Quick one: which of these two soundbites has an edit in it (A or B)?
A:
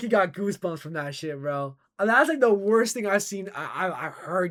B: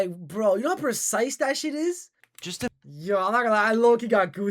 B